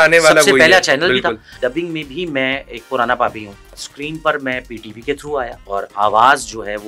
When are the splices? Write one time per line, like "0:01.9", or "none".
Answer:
0:01.5
0:03.8
0:05.6